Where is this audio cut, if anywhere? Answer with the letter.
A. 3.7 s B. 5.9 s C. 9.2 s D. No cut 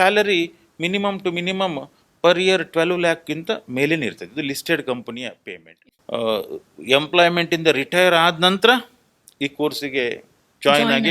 B